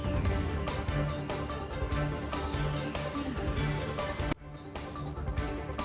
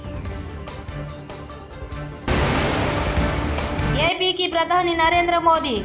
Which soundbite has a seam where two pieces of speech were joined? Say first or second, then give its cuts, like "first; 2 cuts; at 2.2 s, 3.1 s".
second; 1 cut; at 2.2 s